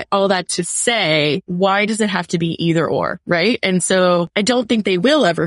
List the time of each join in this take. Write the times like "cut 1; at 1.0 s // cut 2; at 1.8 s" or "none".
cut 1; at 1.5 s // cut 2; at 3.2 s // cut 3; at 4.3 s